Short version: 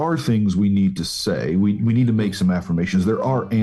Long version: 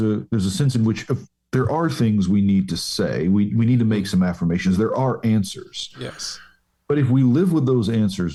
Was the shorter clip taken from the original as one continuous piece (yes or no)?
yes